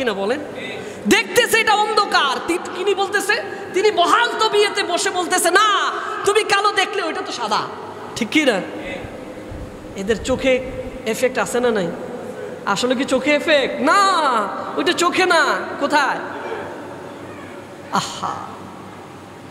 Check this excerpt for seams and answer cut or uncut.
uncut